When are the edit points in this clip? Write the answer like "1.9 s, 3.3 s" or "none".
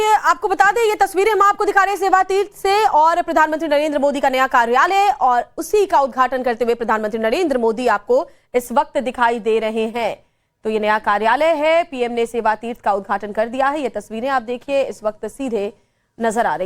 2.5 s